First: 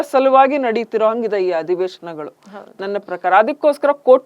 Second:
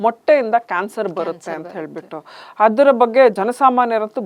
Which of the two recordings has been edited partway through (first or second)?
second